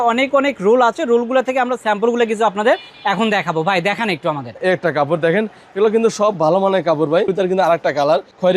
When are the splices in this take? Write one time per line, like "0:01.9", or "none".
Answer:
0:04.6
0:07.3